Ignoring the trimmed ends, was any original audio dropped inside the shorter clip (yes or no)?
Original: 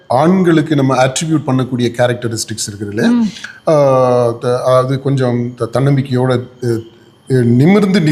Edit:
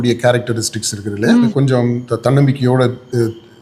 yes